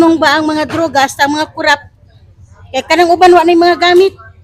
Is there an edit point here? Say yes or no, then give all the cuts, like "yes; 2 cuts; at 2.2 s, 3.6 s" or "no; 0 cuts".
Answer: no; 0 cuts